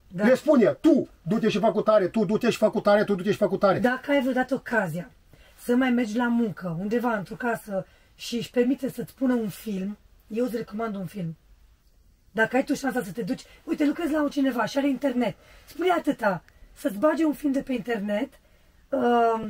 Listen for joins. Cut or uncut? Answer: uncut